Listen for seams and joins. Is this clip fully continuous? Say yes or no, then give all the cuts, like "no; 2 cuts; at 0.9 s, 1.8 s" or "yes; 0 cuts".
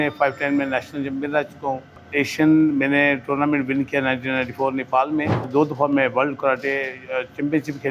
no; 2 cuts; at 2.0 s, 5.5 s